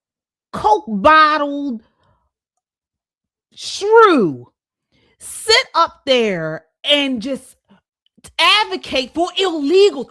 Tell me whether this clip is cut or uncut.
uncut